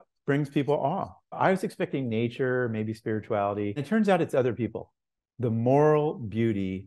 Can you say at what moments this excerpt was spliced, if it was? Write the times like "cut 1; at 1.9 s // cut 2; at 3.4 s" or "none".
cut 1; at 1.2 s // cut 2; at 3.8 s